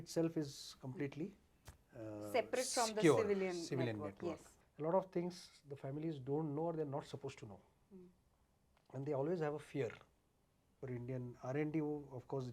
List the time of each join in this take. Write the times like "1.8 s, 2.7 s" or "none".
4.5 s, 10.7 s